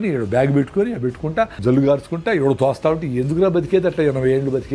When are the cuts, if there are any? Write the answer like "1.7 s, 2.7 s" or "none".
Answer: 1.5 s